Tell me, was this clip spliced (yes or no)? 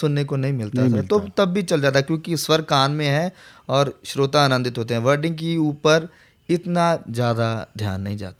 no